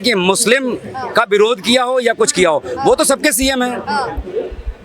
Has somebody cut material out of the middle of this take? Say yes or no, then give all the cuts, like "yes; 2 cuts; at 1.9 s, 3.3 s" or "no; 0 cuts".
no; 0 cuts